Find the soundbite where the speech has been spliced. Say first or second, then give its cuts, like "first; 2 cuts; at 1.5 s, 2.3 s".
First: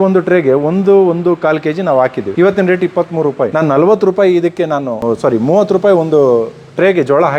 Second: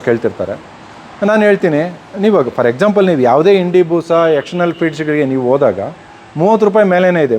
first; 3 cuts; at 2.2 s, 3.5 s, 4.9 s